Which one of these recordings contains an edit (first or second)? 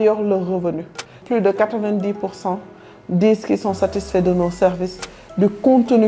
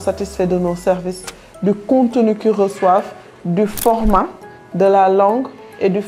first